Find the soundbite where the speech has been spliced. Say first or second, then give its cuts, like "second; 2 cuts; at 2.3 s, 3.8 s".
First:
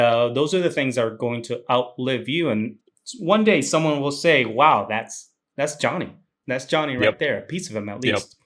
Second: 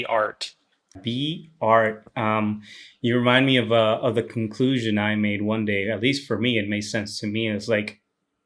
second; 1 cut; at 1.0 s